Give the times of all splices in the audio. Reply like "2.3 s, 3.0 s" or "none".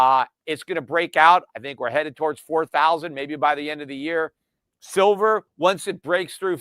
5.5 s